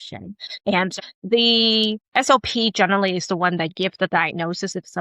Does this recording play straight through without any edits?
no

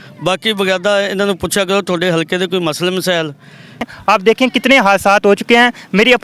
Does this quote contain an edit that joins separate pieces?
yes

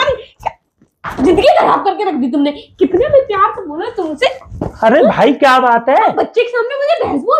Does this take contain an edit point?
no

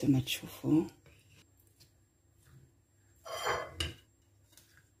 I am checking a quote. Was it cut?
yes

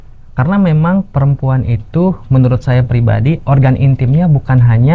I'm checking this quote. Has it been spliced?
no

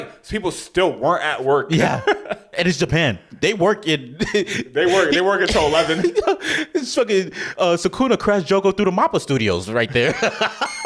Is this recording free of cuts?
yes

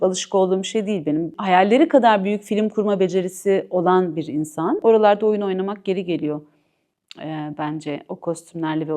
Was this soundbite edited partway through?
yes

